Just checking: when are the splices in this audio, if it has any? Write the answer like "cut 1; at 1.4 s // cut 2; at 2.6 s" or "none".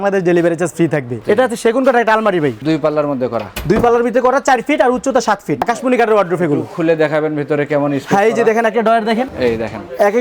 cut 1; at 1.2 s // cut 2; at 2.6 s // cut 3; at 5.6 s // cut 4; at 9.3 s